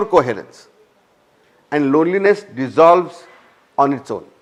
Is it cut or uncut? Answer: uncut